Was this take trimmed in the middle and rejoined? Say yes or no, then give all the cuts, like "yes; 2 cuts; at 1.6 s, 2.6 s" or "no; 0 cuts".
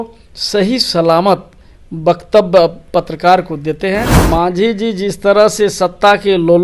yes; 1 cut; at 4.2 s